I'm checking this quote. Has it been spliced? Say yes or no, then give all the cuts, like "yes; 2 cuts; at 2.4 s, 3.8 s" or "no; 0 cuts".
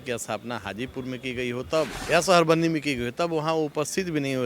yes; 1 cut; at 2.0 s